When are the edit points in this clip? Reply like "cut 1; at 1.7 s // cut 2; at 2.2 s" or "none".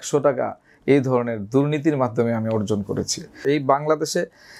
cut 1; at 3.4 s

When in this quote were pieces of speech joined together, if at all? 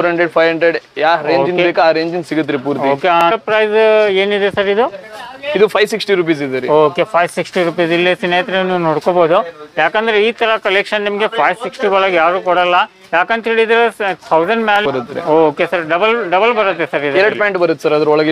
cut 1; at 3.3 s // cut 2; at 14.9 s

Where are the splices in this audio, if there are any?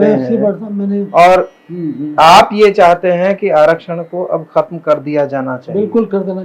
none

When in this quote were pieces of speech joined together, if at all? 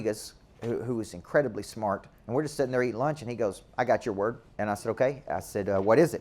cut 1; at 2.1 s // cut 2; at 4.5 s

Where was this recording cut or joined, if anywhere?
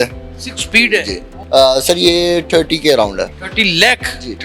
cut 1; at 1.4 s // cut 2; at 3.4 s

